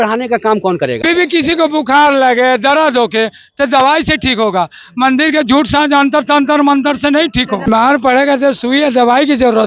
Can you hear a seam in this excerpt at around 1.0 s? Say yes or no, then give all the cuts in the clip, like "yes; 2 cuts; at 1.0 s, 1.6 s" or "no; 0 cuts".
yes; 2 cuts; at 1.0 s, 7.7 s